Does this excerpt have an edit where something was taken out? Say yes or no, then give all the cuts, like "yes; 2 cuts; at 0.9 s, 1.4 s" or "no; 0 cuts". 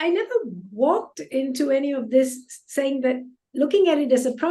no; 0 cuts